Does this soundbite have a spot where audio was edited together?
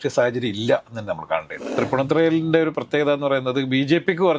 yes; 1 cut; at 1.7 s

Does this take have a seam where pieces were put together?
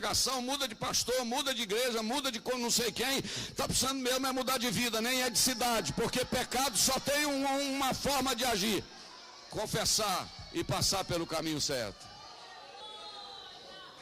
yes; 1 cut; at 12.8 s

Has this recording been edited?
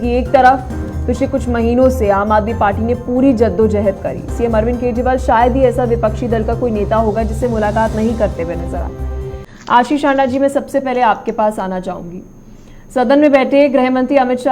yes; 1 cut; at 9.3 s

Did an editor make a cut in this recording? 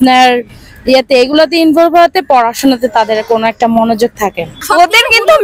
yes; 1 cut; at 4.5 s

